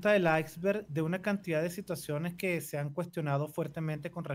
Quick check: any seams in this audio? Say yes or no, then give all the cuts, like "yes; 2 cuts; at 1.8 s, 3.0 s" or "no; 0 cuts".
no; 0 cuts